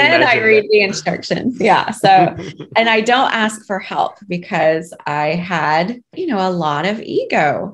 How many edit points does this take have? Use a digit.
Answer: 1